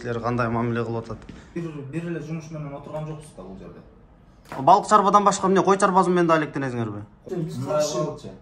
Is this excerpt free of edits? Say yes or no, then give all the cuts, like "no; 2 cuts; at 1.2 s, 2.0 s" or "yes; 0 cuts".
no; 2 cuts; at 1.6 s, 7.2 s